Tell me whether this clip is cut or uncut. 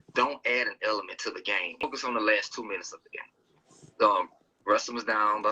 cut